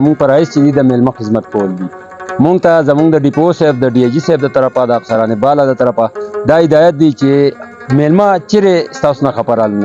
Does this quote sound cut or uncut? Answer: uncut